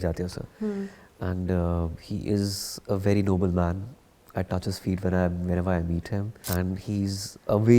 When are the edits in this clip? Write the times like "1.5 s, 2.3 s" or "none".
6.4 s